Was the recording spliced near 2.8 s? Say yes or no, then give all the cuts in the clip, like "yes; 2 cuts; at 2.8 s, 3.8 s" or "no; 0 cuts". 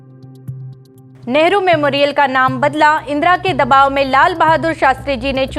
no; 1 cut; at 1.2 s